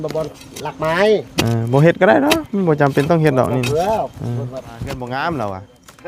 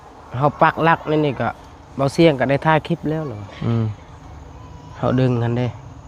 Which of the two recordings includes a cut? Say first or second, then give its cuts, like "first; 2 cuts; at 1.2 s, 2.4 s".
first; 1 cut; at 4.9 s